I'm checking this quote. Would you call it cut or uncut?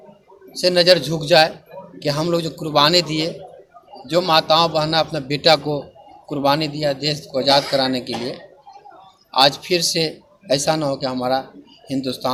uncut